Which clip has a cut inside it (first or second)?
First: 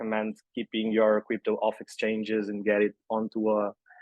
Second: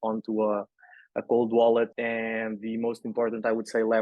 second